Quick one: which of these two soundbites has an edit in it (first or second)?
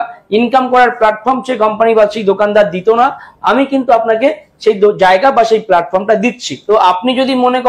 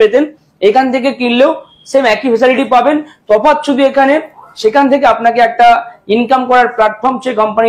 first